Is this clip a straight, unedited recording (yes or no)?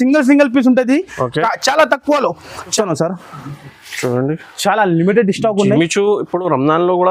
no